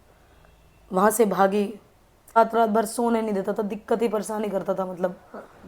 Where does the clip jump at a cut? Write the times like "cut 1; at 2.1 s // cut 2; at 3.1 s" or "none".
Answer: cut 1; at 2.4 s